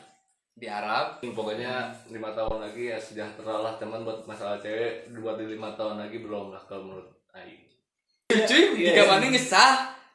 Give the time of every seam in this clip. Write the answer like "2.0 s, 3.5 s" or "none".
1.2 s, 8.3 s